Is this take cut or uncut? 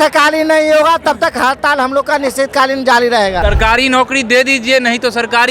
cut